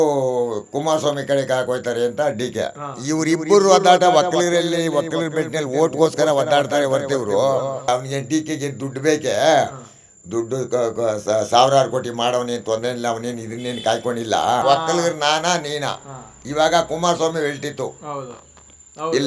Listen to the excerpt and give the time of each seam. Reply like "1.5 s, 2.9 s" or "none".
2.9 s, 7.9 s, 14.6 s

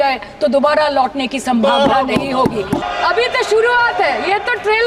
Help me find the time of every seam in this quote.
2.9 s

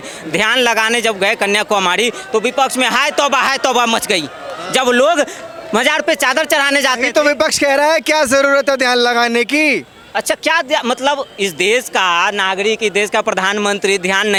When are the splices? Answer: none

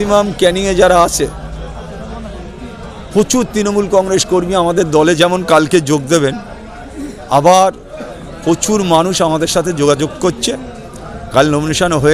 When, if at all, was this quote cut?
none

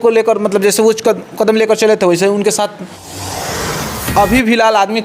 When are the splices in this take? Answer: 3.5 s

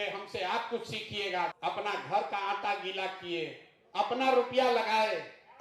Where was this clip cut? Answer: 1.5 s

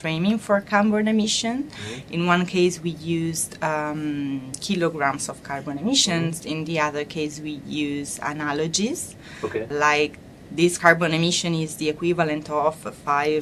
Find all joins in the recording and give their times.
none

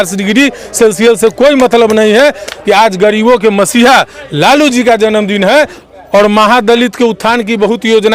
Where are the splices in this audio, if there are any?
2.5 s, 5.8 s

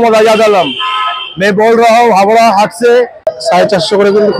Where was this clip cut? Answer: 3.3 s

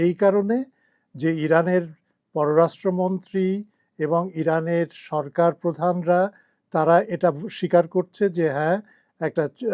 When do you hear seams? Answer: none

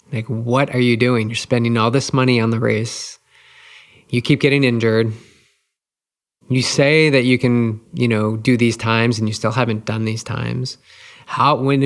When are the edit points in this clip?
none

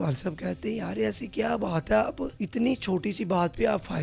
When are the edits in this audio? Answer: 2.3 s

